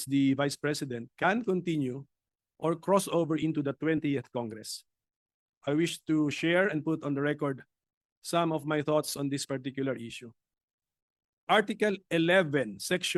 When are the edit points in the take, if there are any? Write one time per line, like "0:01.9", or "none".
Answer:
none